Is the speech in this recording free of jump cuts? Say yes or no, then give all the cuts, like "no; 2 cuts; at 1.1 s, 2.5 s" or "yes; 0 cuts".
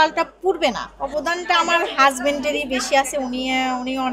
no; 1 cut; at 0.9 s